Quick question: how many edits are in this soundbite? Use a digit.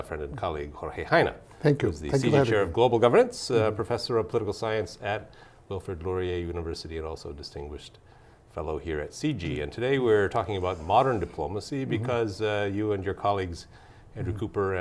1